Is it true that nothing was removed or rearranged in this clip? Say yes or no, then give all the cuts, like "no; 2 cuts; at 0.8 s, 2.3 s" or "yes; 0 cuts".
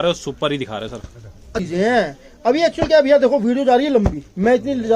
no; 1 cut; at 1.6 s